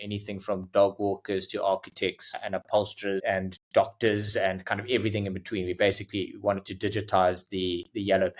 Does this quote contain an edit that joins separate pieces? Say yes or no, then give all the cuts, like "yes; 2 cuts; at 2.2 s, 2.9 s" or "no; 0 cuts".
yes; 1 cut; at 3.2 s